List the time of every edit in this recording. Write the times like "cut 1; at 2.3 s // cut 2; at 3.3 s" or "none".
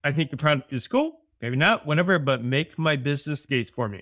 cut 1; at 1.4 s